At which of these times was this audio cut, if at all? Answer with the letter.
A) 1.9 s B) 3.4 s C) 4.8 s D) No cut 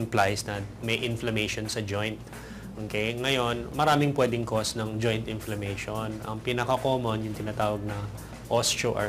A